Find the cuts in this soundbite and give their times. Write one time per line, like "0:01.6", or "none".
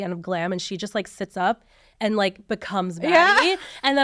none